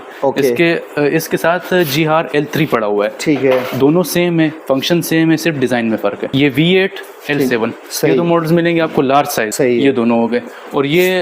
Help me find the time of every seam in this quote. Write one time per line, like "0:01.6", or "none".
0:06.2
0:09.5